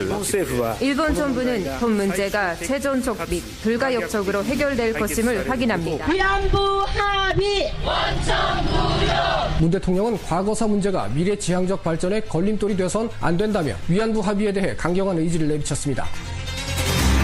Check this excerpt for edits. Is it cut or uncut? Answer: uncut